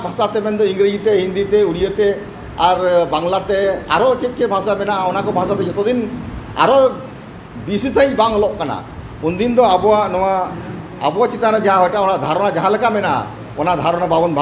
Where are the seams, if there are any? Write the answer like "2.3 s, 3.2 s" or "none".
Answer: none